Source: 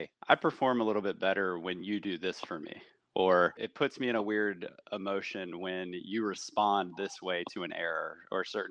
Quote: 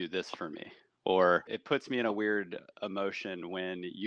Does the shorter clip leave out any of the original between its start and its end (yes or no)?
no